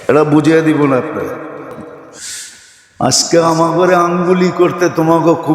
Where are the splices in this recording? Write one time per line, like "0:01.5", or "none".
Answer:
0:02.2